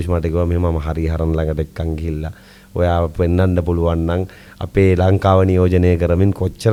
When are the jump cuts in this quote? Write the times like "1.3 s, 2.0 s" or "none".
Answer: none